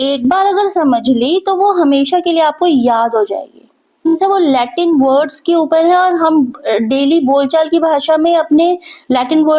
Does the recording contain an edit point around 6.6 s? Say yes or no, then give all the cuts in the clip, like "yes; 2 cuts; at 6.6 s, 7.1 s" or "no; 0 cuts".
no; 1 cut; at 4.0 s